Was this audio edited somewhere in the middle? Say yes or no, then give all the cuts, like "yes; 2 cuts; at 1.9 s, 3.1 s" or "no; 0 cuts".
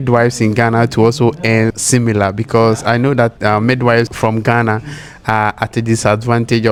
no; 0 cuts